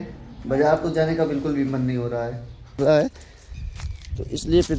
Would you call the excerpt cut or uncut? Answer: cut